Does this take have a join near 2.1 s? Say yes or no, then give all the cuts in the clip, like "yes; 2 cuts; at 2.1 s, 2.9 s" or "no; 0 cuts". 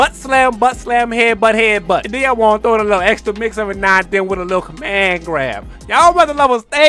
yes; 1 cut; at 2.1 s